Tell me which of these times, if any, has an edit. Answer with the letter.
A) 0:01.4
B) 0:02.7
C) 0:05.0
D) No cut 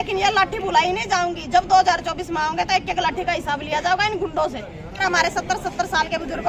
C